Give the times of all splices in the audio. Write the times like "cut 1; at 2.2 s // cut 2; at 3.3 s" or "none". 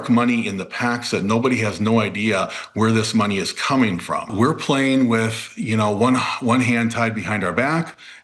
cut 1; at 4.3 s

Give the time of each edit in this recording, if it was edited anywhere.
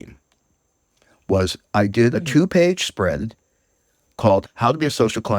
cut 1; at 2.1 s // cut 2; at 4.5 s

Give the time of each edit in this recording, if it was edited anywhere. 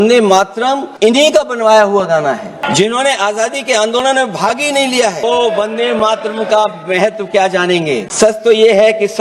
cut 1; at 0.9 s // cut 2; at 2.6 s // cut 3; at 5.2 s // cut 4; at 8.1 s

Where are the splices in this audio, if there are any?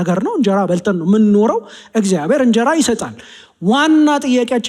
none

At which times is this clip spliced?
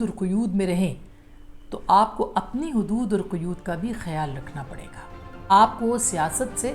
cut 1; at 5.5 s

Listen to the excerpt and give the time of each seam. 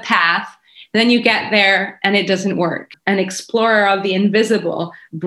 cut 1; at 2.9 s

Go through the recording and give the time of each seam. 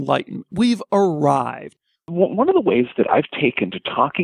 cut 1; at 2.1 s

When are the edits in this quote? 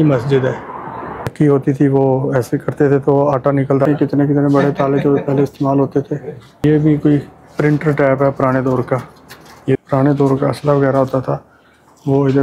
cut 1; at 1.2 s // cut 2; at 3.9 s // cut 3; at 6.6 s // cut 4; at 9.8 s

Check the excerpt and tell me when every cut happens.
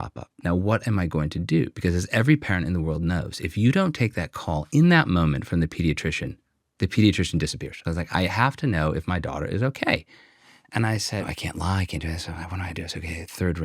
cut 1; at 7.8 s // cut 2; at 11.2 s

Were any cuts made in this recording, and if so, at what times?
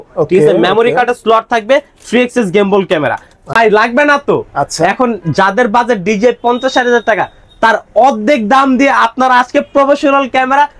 cut 1; at 3.4 s

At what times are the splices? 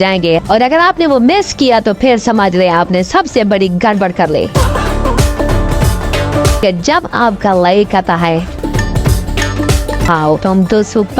cut 1; at 4.5 s // cut 2; at 6.6 s // cut 3; at 8.5 s // cut 4; at 10.1 s

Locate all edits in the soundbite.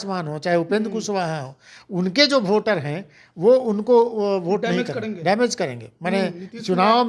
none

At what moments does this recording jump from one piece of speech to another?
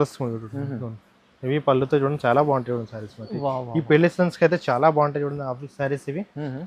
none

